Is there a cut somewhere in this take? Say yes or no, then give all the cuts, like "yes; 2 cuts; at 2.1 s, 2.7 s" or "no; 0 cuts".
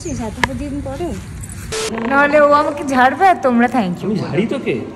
yes; 1 cut; at 1.9 s